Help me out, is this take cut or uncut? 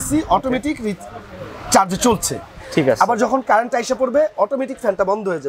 uncut